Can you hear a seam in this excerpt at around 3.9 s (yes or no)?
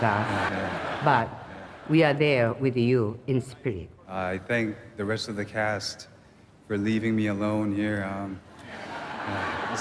yes